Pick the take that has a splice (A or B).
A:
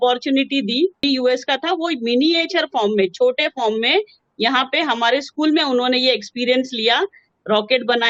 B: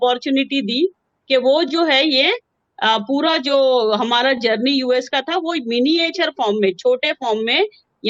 A